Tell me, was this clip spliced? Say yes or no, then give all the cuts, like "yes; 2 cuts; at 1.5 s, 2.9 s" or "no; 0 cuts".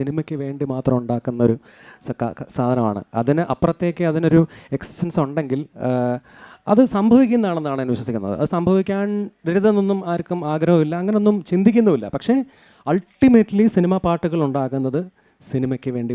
no; 0 cuts